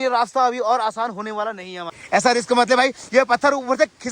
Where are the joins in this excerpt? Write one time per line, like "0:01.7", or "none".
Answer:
0:02.0